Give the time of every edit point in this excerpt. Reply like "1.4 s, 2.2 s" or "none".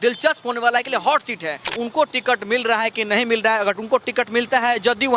1.8 s

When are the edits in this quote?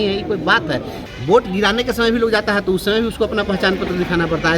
0.9 s

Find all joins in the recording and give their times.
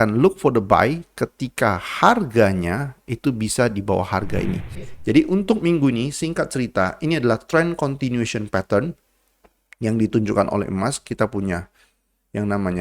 4.9 s

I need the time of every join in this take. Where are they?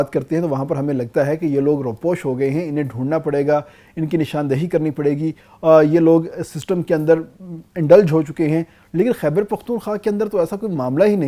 none

